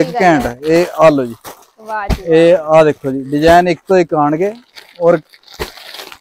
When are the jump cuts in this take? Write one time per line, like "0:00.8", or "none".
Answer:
none